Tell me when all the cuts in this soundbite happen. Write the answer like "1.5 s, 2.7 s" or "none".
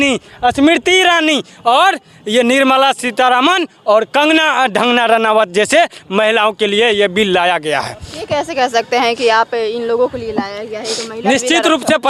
none